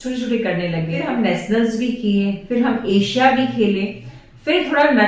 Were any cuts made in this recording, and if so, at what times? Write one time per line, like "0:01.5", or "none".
0:00.9